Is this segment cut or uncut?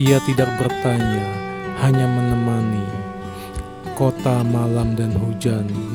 uncut